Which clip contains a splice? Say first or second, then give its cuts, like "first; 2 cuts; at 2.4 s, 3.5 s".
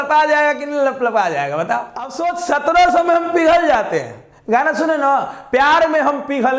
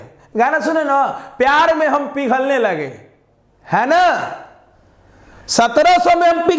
first; 1 cut; at 2.2 s